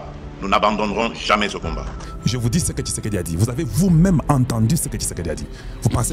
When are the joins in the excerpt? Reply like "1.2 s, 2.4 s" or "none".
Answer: 2.1 s